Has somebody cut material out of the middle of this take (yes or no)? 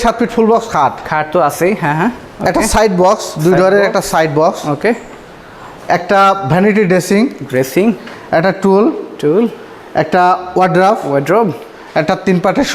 no